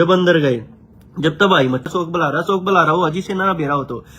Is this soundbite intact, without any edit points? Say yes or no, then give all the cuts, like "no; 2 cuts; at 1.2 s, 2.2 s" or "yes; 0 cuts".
no; 1 cut; at 1.9 s